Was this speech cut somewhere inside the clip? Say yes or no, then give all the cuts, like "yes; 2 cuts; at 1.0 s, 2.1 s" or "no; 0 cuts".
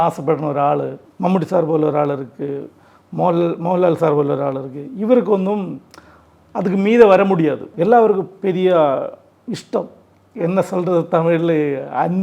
yes; 2 cuts; at 1.0 s, 7.7 s